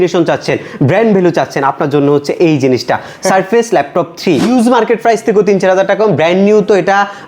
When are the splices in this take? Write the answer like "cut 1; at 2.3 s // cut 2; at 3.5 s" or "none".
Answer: cut 1; at 4.5 s

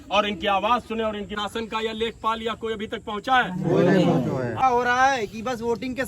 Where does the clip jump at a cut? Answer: cut 1; at 1.3 s // cut 2; at 4.6 s

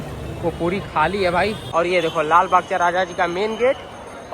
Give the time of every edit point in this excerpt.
cut 1; at 1.6 s

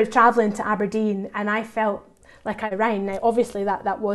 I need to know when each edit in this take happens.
cut 1; at 2.6 s

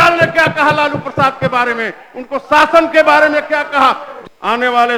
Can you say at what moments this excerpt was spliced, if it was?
cut 1; at 4.1 s

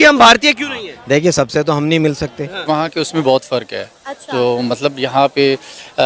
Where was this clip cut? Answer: cut 1; at 2.6 s

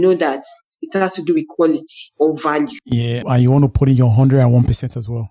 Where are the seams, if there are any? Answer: cut 1; at 3.2 s

